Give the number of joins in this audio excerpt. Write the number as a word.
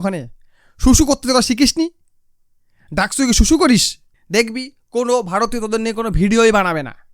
one